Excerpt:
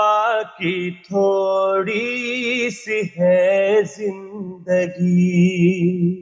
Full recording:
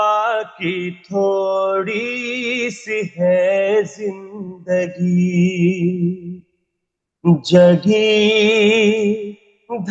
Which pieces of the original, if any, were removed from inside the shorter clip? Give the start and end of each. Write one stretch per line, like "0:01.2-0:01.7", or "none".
none

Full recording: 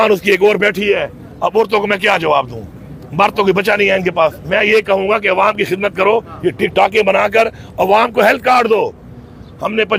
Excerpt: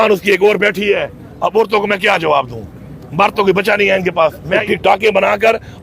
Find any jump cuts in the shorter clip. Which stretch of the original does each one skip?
0:04.6-0:06.6

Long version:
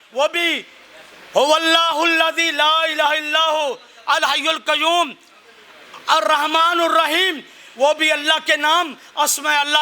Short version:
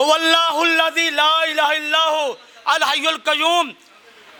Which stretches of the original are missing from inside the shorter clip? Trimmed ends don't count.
none

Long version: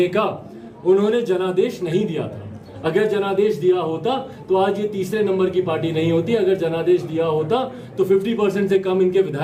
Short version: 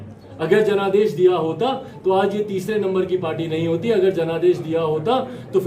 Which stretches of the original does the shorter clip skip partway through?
none

